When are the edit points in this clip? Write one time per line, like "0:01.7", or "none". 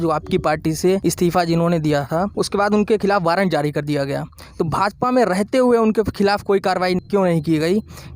0:01.0
0:02.3
0:07.0